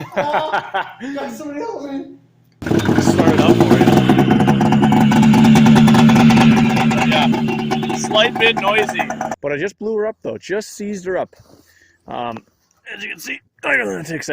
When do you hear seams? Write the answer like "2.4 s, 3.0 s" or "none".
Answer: 2.2 s, 9.3 s